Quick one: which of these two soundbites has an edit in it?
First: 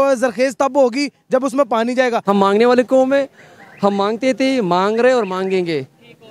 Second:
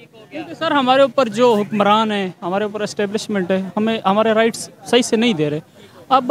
first; 1 cut; at 2.2 s

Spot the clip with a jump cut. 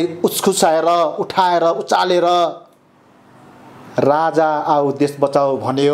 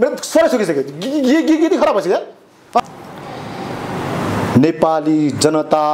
second; 1 cut; at 2.8 s

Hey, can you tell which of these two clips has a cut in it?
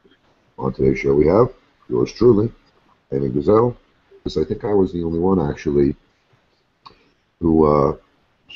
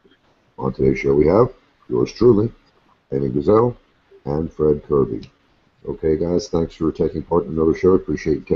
second; 1 cut; at 4.2 s

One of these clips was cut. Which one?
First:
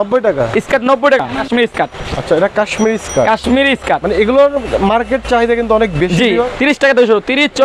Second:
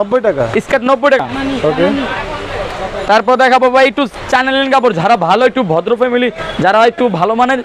first; 2 cuts; at 1.4 s, 6.5 s

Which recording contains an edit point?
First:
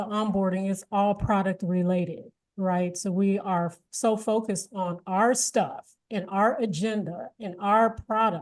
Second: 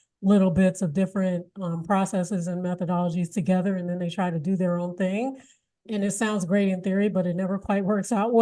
second; 1 cut; at 5.8 s

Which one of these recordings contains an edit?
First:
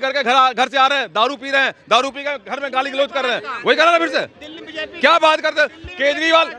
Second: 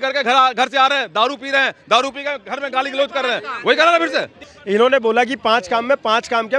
second; 1 cut; at 4.5 s

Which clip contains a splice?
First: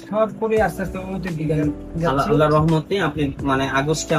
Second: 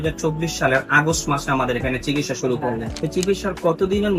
second; 1 cut; at 2.9 s

